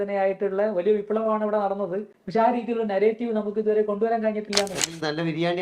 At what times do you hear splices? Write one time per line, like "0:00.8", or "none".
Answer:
0:02.1
0:04.8